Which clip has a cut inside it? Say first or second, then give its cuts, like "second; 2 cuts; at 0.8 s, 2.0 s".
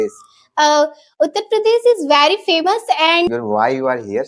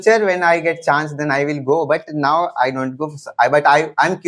first; 1 cut; at 3.3 s